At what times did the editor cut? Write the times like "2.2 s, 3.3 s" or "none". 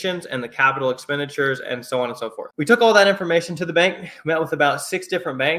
2.5 s